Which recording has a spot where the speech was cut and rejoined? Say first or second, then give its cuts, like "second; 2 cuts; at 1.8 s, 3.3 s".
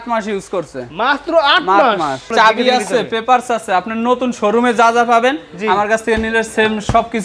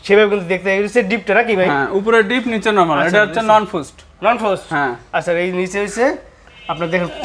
first; 1 cut; at 2.3 s